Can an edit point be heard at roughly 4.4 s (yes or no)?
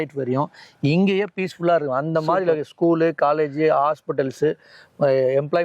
no